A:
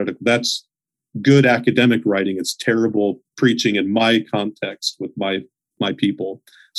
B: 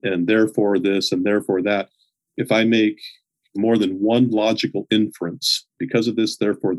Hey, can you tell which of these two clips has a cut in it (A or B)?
B